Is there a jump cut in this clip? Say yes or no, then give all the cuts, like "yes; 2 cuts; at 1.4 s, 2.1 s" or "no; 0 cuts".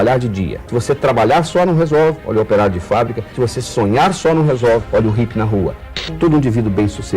yes; 1 cut; at 5.9 s